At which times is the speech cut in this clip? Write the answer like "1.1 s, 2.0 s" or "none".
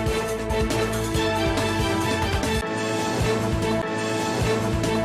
1.3 s